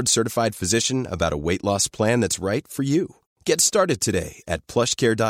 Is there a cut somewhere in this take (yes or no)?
no